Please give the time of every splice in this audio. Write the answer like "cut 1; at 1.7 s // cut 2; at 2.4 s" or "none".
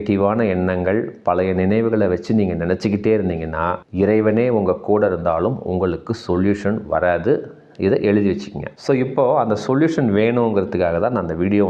none